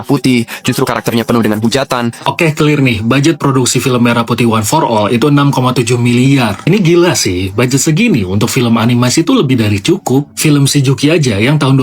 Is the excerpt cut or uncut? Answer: cut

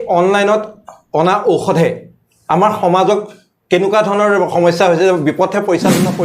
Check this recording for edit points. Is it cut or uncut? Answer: uncut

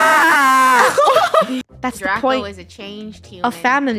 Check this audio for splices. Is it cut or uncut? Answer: cut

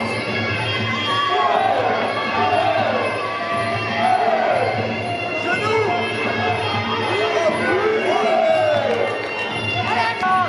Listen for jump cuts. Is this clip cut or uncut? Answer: uncut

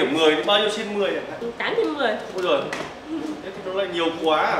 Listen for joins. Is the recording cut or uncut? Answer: uncut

